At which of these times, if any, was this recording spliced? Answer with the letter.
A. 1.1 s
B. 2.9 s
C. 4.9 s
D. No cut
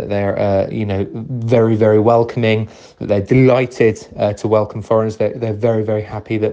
D